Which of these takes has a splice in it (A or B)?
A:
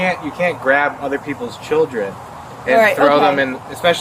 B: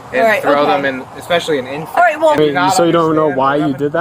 B